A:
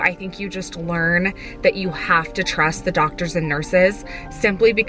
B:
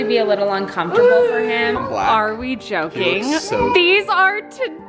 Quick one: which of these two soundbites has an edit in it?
B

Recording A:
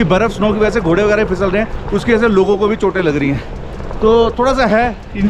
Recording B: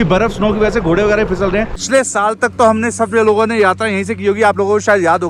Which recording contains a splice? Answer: B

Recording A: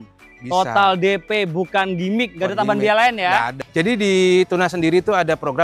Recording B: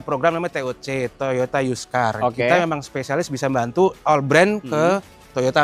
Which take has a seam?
A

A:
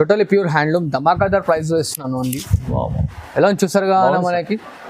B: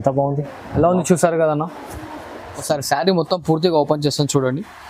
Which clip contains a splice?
B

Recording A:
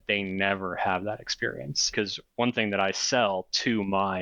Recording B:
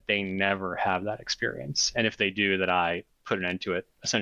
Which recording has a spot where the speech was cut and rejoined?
A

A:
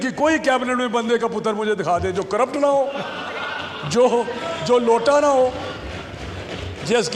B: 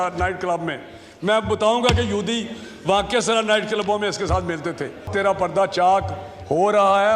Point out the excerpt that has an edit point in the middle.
B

